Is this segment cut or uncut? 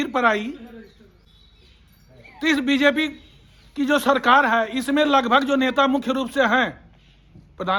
uncut